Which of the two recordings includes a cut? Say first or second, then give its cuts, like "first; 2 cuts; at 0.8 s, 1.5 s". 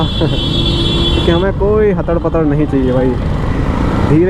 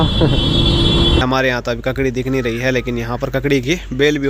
second; 2 cuts; at 1.2 s, 3.4 s